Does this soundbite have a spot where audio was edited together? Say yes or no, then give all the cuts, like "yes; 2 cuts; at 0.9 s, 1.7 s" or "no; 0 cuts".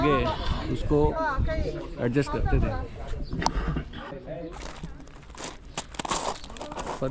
yes; 1 cut; at 4.5 s